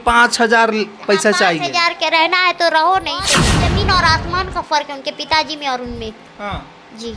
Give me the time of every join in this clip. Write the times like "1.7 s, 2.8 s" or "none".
3.5 s